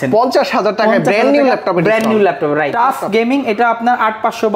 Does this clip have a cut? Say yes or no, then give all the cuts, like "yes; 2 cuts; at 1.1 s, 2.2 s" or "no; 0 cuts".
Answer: yes; 1 cut; at 2.7 s